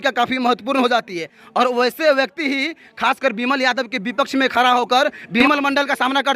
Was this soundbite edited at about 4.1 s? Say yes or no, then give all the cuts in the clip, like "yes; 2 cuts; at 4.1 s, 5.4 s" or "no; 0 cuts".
no; 1 cut; at 5.4 s